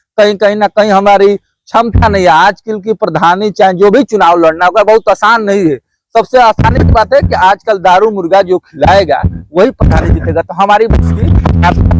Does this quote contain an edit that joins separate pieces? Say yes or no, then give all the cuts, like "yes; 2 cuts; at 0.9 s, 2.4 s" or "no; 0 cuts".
no; 0 cuts